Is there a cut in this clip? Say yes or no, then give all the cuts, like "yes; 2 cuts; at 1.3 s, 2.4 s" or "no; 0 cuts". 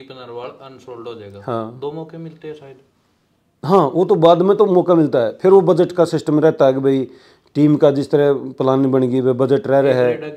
no; 0 cuts